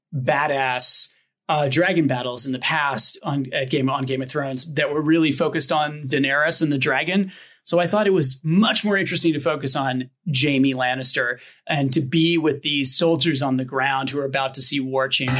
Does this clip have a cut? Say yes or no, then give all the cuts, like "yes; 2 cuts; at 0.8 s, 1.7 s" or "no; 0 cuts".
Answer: no; 0 cuts